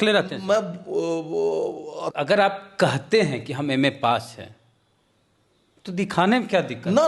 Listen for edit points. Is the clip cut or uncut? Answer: cut